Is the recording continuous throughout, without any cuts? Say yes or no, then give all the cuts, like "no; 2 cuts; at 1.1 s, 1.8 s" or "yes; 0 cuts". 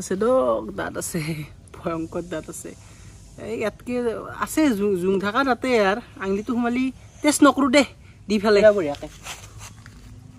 no; 1 cut; at 8.6 s